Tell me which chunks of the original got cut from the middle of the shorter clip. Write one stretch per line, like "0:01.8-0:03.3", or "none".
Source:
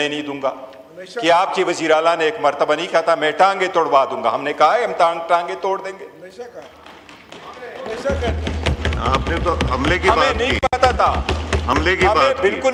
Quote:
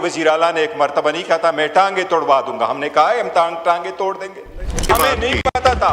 0:06.5-0:10.0